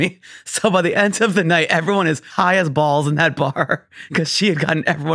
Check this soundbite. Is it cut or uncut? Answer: cut